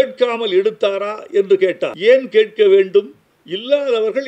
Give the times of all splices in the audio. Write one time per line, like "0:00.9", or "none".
0:01.9